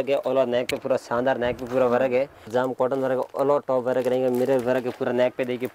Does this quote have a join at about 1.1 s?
no; 1 cut; at 2.5 s

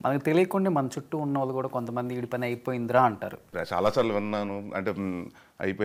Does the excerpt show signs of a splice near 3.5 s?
yes; 1 cut; at 3.5 s

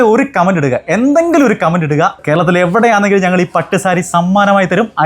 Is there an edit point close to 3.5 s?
no; 1 cut; at 2.2 s

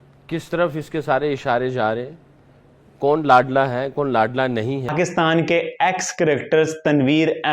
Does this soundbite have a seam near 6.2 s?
no; 1 cut; at 4.9 s

